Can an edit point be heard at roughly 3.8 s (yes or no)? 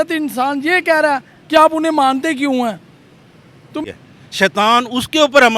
yes